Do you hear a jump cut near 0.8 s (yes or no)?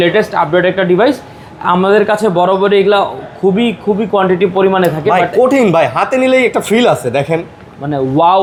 no